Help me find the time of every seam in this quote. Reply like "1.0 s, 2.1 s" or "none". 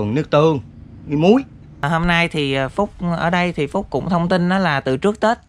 1.8 s